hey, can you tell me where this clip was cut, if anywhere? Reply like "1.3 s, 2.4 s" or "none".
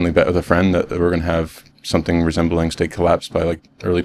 none